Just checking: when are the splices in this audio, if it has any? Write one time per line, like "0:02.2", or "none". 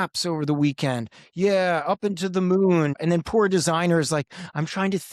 0:03.0